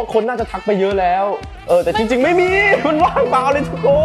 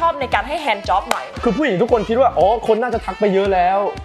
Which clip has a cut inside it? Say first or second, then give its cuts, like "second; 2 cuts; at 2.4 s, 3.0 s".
second; 1 cut; at 1.3 s